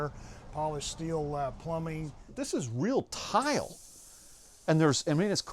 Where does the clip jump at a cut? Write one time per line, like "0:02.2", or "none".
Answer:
0:02.2